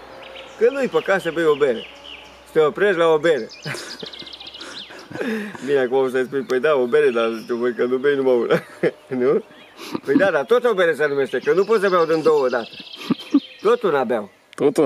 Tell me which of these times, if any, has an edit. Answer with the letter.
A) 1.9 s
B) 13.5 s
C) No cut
C